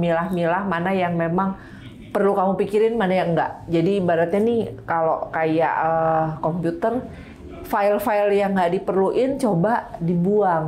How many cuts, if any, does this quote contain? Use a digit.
0